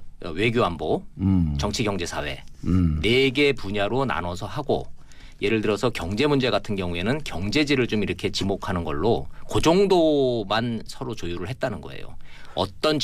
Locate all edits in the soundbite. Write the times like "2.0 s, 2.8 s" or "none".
4.9 s